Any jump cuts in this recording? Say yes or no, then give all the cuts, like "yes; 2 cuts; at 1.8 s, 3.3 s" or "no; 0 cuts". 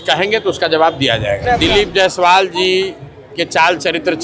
yes; 1 cut; at 1.4 s